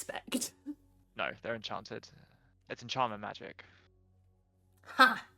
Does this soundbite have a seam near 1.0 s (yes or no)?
yes